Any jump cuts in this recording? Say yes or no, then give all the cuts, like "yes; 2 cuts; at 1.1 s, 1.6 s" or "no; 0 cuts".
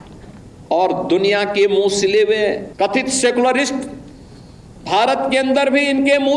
yes; 1 cut; at 2.7 s